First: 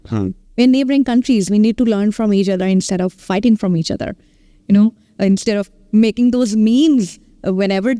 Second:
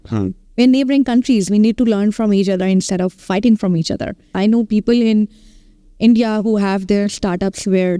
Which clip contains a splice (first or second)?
second